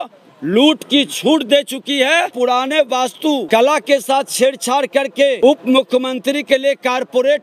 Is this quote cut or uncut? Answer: cut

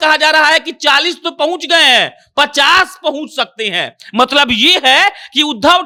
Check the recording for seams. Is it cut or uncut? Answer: uncut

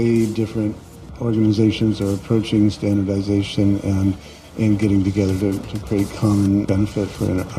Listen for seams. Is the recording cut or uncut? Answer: cut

